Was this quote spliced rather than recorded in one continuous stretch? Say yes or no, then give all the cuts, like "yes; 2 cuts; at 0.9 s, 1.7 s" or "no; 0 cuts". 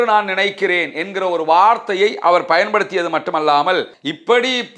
yes; 1 cut; at 3.9 s